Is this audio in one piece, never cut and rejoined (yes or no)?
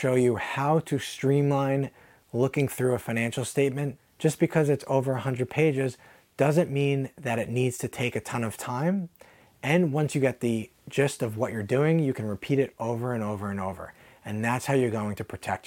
yes